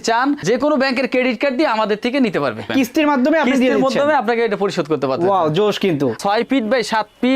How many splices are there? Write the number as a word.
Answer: two